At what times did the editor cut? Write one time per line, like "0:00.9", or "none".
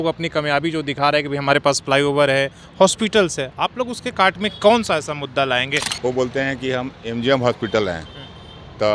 0:05.8